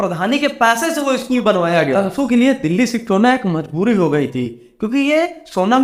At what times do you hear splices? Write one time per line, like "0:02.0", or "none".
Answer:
0:02.0